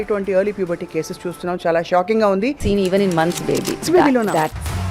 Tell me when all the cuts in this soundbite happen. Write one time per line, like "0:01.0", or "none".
0:02.6
0:03.9